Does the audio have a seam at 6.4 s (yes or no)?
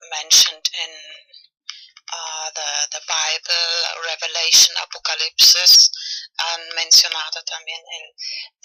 no